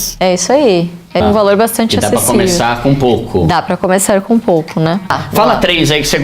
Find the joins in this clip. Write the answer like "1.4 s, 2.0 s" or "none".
1.2 s, 5.2 s